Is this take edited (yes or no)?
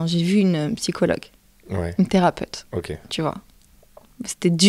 no